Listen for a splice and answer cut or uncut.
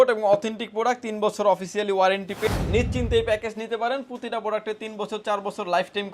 cut